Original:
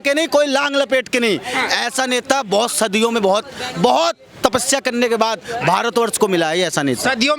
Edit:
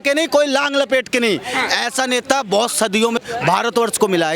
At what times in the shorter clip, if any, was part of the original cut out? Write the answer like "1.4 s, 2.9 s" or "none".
3.2 s